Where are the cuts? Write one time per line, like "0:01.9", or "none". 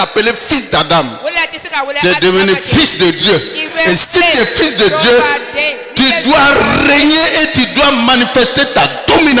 none